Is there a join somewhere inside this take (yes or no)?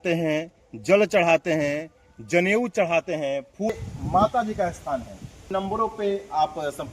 yes